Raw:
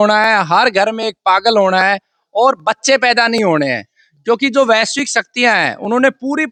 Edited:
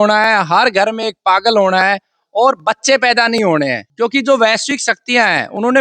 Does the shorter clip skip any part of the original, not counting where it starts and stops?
yes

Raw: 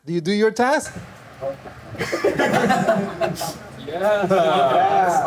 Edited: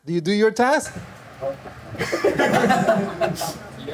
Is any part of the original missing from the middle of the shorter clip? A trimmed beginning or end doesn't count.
no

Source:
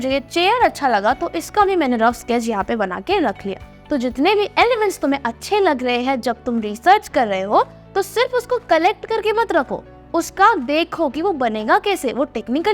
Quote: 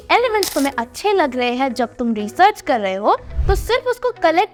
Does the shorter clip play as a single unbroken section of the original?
yes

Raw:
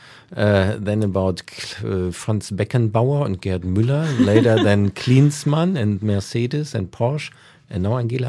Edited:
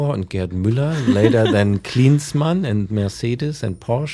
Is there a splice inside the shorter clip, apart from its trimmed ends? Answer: no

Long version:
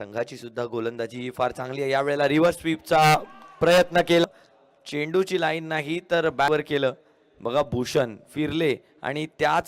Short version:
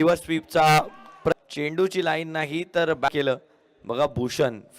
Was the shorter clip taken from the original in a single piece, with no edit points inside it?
no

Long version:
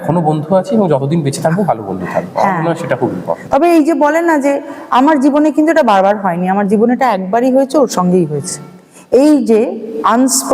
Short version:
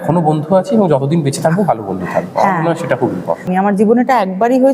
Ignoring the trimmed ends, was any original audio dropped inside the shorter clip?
yes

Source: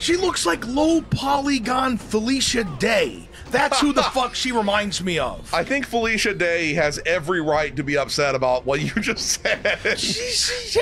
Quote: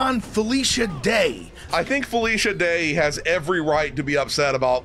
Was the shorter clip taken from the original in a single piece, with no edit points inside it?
no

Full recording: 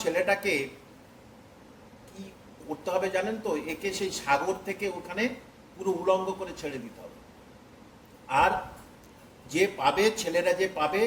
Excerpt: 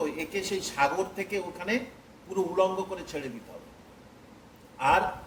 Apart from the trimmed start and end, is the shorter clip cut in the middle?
no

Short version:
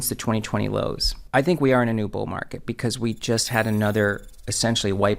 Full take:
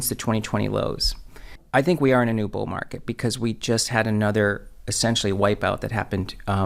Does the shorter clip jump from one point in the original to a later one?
yes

